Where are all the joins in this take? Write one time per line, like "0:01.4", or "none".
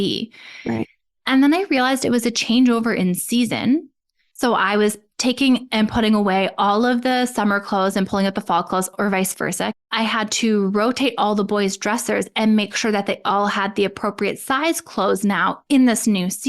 0:09.8